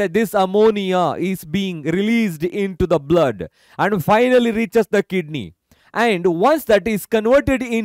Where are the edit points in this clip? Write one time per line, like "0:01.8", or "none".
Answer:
none